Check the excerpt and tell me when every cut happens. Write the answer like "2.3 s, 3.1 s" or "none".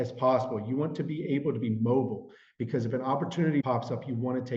3.6 s